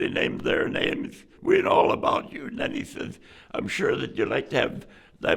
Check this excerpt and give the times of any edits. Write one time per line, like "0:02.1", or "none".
0:01.2